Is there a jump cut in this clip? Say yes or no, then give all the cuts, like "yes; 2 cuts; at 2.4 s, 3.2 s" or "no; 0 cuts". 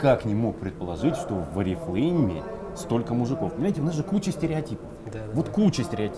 no; 0 cuts